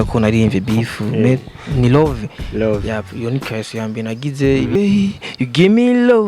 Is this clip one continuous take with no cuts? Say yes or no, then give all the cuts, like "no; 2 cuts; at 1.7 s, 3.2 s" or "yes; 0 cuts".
no; 1 cut; at 4.8 s